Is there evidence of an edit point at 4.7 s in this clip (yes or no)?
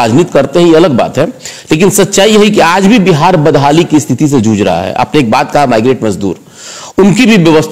no